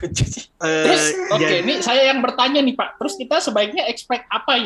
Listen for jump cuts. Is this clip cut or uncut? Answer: uncut